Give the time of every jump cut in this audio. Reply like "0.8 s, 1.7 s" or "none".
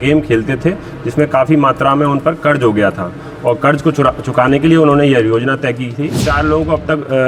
6.2 s